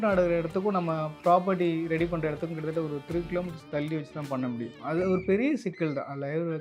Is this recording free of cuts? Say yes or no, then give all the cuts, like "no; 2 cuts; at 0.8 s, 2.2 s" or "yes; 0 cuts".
no; 1 cut; at 4.7 s